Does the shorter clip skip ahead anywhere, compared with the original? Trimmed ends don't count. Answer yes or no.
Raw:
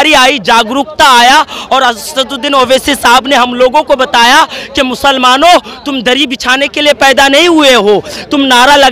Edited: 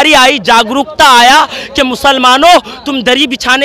yes